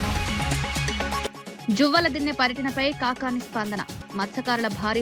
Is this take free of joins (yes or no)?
yes